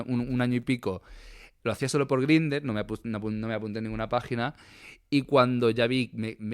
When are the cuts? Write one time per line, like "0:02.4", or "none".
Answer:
none